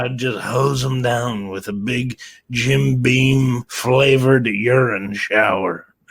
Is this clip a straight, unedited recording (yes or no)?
no